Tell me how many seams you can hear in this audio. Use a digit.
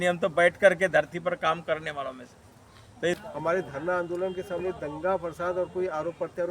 1